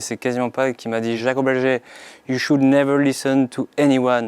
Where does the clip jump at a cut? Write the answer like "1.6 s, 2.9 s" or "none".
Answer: 1.2 s